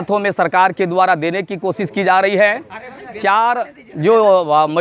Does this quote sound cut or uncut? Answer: uncut